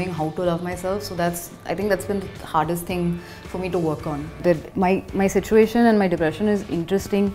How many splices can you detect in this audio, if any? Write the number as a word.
one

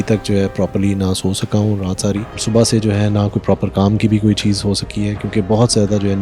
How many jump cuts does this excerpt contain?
one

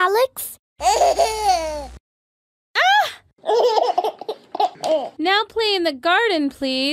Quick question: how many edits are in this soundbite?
one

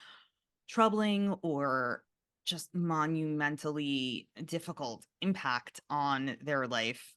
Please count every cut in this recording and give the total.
two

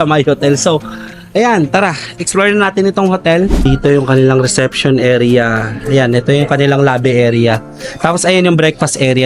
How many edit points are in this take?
one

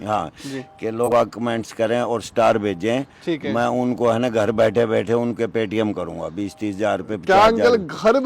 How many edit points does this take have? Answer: one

